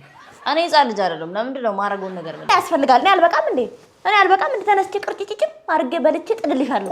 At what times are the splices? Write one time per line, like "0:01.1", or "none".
0:02.5